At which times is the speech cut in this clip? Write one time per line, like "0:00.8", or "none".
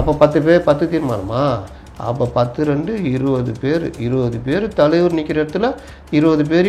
none